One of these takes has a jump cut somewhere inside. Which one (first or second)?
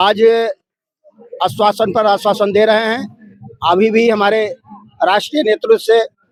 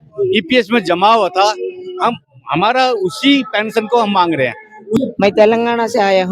second